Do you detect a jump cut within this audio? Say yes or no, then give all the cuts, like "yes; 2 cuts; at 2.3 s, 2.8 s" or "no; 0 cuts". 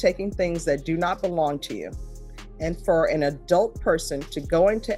no; 0 cuts